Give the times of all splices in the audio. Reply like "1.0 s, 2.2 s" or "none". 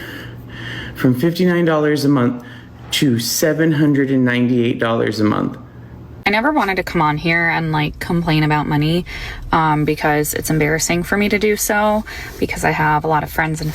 6.1 s